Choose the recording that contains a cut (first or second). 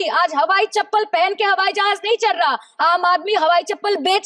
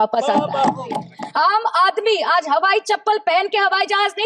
second